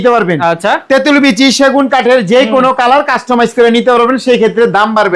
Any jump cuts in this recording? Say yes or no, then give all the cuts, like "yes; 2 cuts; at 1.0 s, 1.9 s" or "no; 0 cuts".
no; 0 cuts